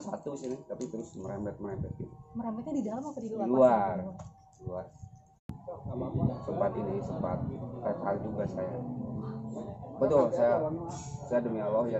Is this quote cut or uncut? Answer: cut